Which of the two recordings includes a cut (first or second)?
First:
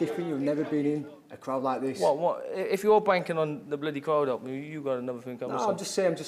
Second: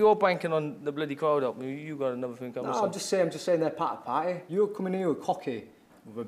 second